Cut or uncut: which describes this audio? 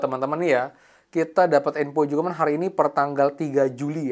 uncut